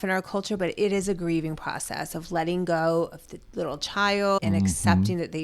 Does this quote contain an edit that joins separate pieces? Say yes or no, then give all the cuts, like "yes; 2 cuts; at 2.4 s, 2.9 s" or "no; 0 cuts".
yes; 1 cut; at 4.4 s